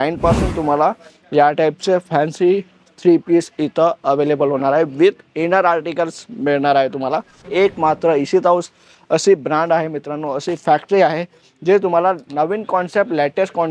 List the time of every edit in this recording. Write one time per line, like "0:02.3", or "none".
0:07.4